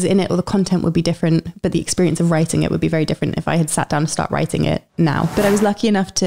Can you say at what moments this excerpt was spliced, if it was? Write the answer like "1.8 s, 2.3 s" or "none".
5.3 s